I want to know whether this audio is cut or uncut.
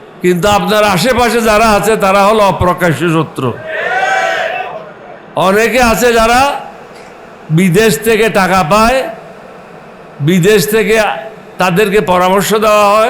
uncut